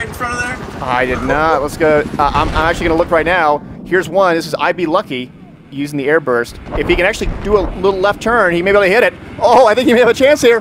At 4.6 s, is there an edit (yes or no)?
yes